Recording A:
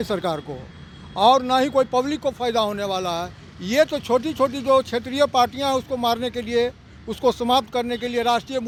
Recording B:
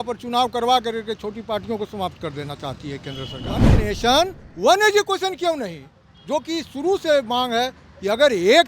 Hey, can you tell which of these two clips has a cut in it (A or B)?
B